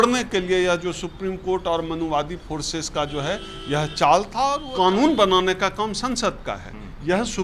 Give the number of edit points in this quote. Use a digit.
1